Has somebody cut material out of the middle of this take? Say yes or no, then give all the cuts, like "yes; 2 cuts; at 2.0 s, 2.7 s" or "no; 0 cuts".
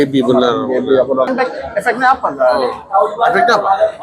yes; 1 cut; at 1.3 s